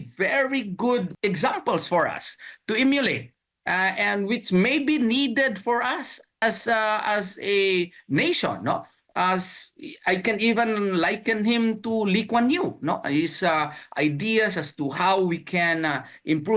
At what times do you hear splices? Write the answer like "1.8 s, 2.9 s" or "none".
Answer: 1.1 s, 6.4 s